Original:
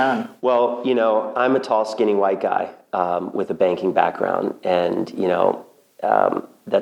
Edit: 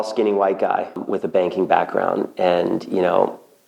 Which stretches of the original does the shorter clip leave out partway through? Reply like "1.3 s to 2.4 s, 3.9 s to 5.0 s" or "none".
2.8 s to 3.3 s